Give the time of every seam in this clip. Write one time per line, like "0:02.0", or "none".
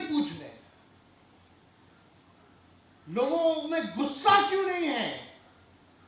none